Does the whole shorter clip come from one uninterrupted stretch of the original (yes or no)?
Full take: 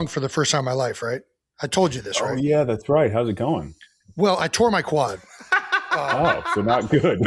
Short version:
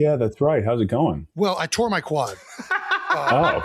no